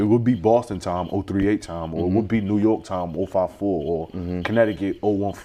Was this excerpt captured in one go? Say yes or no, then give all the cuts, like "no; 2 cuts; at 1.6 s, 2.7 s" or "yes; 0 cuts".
yes; 0 cuts